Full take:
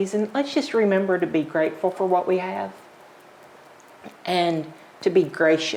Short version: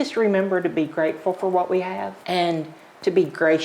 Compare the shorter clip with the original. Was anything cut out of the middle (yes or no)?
yes